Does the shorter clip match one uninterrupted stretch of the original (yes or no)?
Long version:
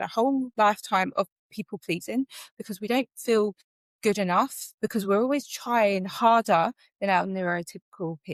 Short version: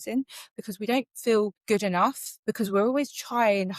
no